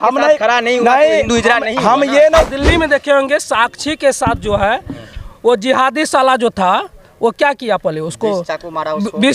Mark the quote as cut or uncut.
cut